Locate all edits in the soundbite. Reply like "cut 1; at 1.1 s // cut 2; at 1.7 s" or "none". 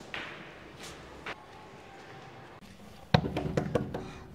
cut 1; at 2.6 s